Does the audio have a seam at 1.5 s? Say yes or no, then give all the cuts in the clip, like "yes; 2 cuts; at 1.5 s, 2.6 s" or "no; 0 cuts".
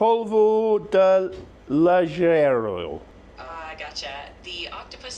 no; 1 cut; at 3.2 s